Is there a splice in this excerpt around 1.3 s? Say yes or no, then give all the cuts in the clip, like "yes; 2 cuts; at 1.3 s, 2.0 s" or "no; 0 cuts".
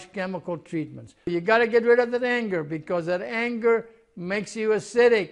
yes; 1 cut; at 1.3 s